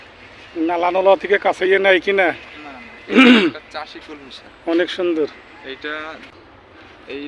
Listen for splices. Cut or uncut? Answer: cut